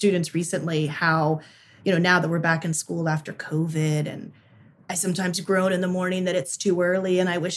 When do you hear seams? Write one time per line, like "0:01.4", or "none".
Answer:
none